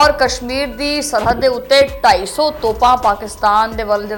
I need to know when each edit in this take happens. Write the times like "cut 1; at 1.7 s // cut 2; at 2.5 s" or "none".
none